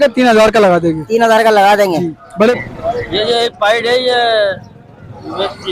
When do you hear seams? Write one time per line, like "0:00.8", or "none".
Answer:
0:02.6